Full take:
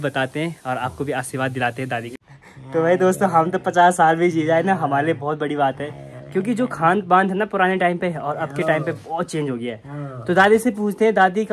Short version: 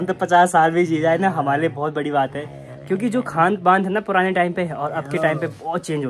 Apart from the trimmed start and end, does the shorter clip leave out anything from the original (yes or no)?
no